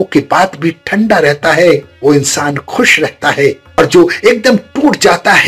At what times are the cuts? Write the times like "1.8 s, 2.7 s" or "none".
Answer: none

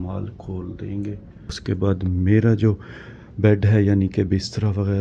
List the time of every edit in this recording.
1.5 s

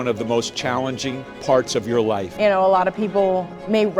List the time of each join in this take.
2.3 s

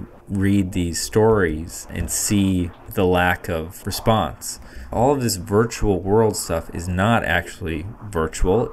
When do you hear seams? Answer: 2.1 s, 2.8 s, 3.7 s, 4.8 s

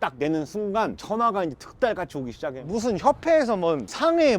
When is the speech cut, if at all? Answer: 2.7 s

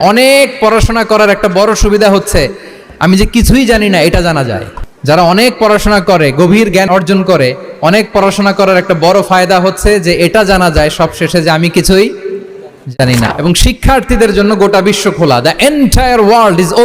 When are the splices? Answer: 13.0 s

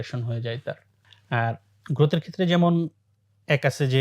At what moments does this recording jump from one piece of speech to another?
none

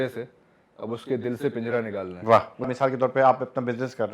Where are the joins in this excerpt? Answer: 2.7 s

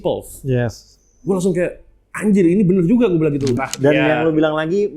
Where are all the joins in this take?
3.6 s

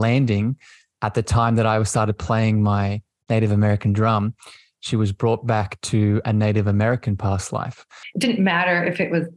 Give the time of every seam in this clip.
8.0 s

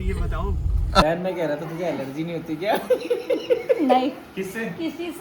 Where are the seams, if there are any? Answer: 1.0 s

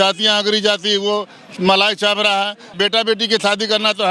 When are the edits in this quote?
2.7 s

